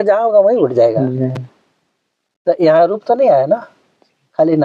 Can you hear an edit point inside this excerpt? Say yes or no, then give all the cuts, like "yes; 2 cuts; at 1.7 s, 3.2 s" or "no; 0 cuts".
no; 0 cuts